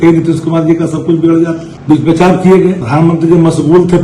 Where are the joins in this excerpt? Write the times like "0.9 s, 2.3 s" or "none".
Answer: 1.7 s, 2.8 s